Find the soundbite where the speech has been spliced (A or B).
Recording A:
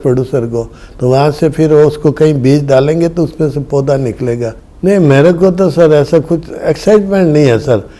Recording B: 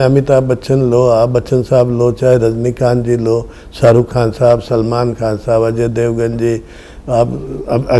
A